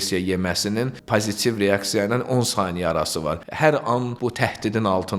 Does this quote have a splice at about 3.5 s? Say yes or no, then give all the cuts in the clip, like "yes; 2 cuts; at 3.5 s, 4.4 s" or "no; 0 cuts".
yes; 3 cuts; at 1.0 s, 3.5 s, 4.1 s